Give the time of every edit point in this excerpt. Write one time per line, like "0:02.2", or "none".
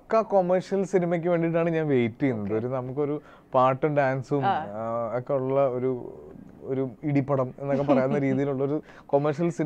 none